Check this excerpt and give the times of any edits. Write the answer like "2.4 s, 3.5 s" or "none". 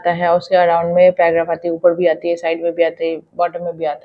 none